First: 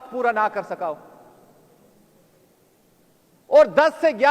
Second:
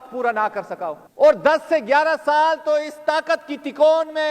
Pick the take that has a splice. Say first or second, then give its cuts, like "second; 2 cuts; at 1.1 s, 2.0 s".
second; 1 cut; at 1.0 s